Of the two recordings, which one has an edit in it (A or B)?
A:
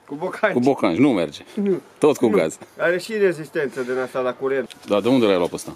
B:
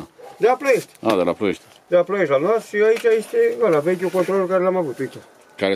A